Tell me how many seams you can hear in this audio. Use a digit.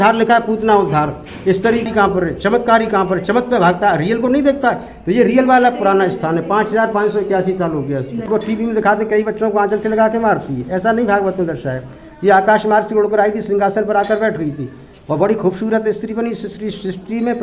2